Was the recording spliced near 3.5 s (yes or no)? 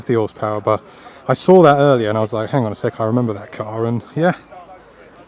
no